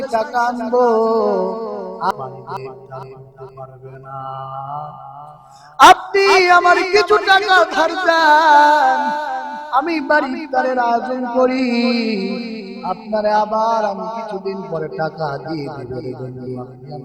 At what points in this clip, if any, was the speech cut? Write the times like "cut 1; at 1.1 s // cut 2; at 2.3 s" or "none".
cut 1; at 2.1 s